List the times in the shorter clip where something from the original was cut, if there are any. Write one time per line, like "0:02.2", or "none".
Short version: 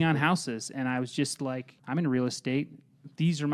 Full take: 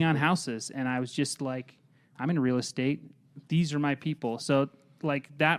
0:01.7